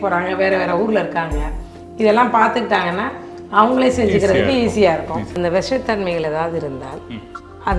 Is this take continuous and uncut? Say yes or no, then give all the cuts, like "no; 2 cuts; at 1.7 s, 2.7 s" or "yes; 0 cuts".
no; 1 cut; at 5.3 s